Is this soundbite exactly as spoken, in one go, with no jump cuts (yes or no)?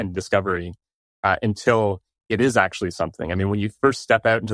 yes